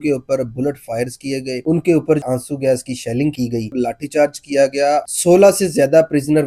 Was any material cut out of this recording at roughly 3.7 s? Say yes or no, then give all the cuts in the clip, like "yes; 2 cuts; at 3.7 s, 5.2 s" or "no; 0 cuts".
yes; 3 cuts; at 2.2 s, 3.7 s, 5.1 s